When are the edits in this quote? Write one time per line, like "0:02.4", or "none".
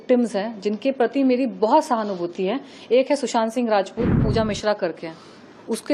0:04.2